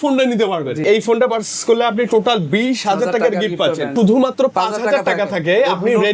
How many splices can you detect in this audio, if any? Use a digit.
2